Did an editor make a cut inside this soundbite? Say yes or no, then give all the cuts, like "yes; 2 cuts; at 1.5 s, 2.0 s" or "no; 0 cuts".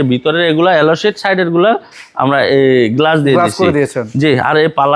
no; 0 cuts